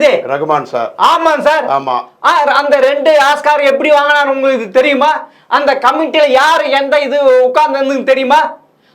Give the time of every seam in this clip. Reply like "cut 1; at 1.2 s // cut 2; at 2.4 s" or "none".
none